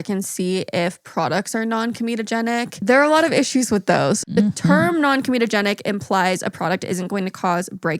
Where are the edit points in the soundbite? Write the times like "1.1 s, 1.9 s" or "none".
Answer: 2.8 s, 4.2 s